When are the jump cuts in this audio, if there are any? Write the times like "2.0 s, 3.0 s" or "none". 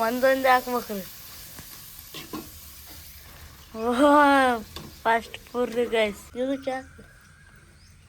6.2 s